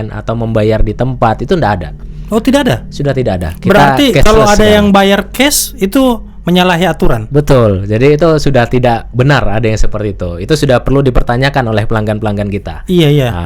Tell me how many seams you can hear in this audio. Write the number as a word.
zero